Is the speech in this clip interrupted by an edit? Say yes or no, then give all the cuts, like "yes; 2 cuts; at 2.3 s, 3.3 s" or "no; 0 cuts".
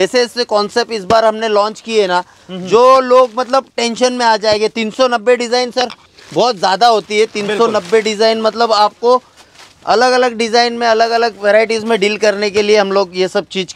no; 0 cuts